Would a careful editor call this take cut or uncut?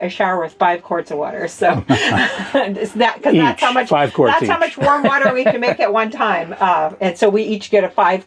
uncut